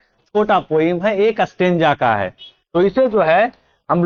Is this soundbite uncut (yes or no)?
yes